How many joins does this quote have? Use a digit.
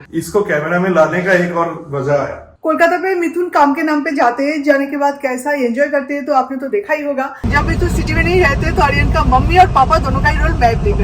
2